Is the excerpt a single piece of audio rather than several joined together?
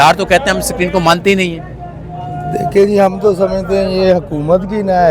yes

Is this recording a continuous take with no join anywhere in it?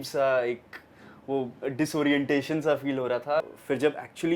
no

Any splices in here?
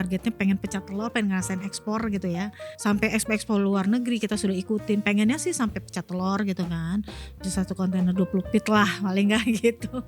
yes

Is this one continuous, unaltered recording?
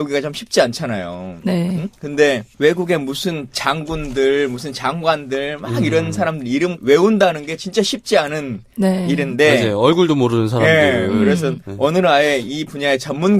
no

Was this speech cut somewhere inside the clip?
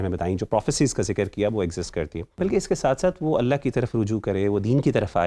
yes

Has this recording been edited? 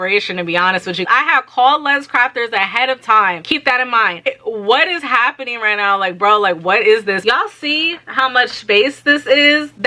yes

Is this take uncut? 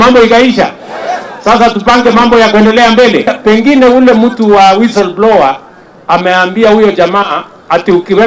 no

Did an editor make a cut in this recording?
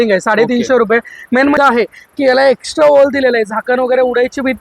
yes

